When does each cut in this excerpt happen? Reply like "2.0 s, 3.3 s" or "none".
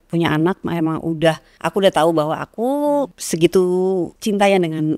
1.5 s, 3.2 s, 4.1 s